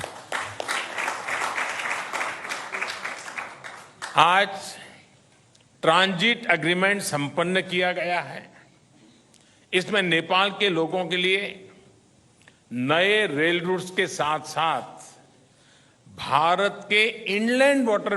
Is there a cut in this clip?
no; 0 cuts

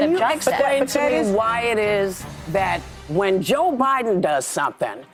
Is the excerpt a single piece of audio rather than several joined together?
yes; 0 cuts

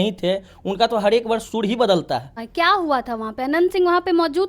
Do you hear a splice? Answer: yes; 1 cut; at 2.4 s

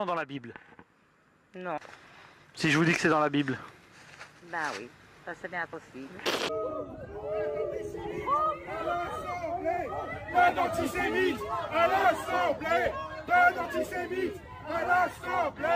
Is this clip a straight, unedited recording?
no; 1 cut; at 6.5 s

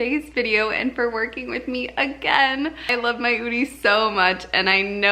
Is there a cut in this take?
yes; 1 cut; at 2.9 s

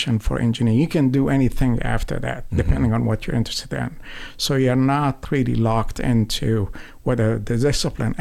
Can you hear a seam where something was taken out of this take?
no; 0 cuts

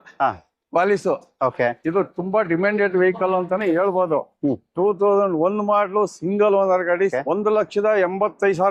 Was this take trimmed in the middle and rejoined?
yes; 1 cut; at 7.1 s

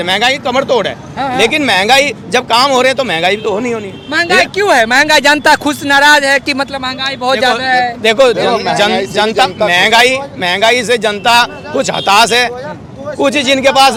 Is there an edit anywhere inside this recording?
no; 0 cuts

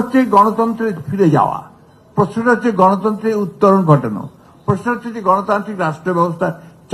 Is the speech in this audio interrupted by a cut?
no; 0 cuts

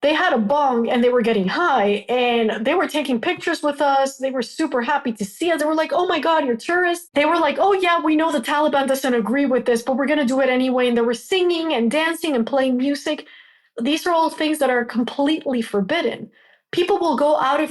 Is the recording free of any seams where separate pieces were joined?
no; 1 cut; at 7.1 s

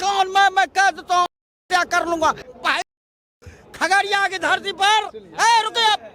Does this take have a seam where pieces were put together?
yes; 1 cut; at 2.5 s

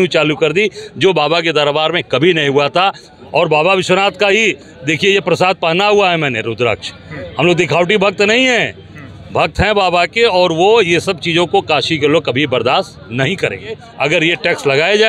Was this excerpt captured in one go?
no; 2 cuts; at 3.1 s, 13.9 s

